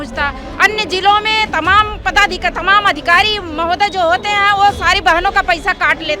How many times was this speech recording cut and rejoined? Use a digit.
0